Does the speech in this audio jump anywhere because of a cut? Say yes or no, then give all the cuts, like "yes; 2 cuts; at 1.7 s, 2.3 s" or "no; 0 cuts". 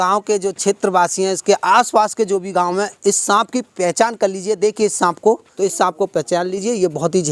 yes; 1 cut; at 5.5 s